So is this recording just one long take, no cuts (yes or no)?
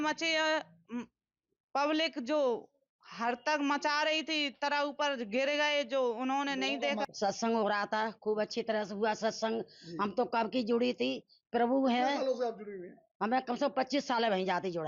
yes